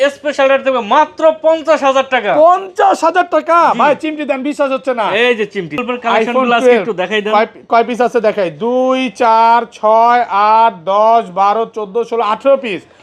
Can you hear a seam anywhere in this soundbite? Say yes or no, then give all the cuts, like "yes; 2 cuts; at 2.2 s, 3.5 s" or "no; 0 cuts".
yes; 1 cut; at 5.8 s